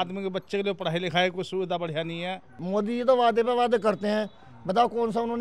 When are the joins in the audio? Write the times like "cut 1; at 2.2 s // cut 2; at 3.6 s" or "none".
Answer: cut 1; at 2.6 s